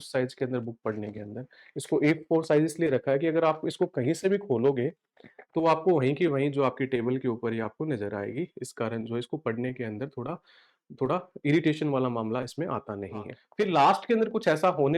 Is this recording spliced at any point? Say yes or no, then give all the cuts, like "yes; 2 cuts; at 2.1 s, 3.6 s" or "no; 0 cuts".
yes; 1 cut; at 13.4 s